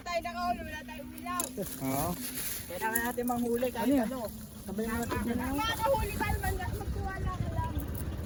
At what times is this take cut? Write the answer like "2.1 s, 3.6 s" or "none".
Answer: none